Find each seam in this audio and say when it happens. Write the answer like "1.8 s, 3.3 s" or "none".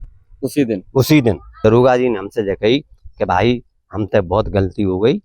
1.6 s